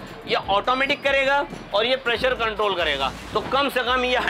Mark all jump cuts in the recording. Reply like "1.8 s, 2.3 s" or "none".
3.2 s